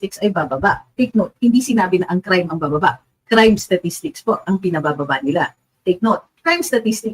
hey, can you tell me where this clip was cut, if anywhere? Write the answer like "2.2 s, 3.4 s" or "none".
5.7 s